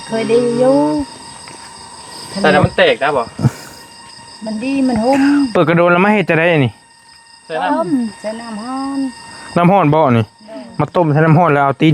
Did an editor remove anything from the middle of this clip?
no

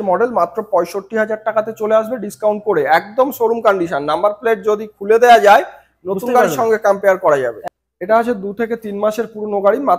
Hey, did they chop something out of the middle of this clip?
yes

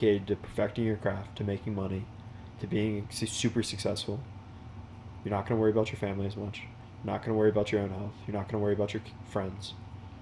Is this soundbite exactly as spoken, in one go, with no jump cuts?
yes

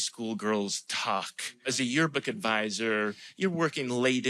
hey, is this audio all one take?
no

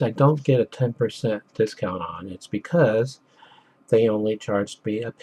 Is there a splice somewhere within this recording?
no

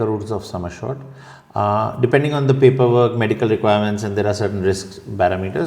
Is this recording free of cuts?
yes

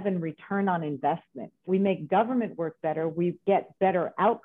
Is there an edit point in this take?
yes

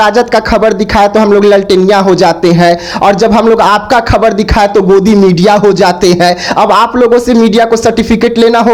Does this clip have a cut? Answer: no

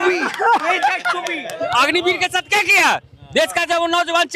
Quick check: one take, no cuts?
no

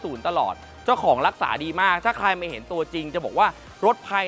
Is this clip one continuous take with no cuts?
yes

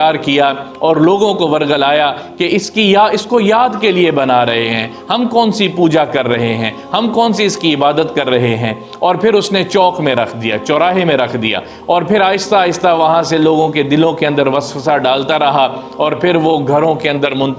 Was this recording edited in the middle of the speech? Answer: no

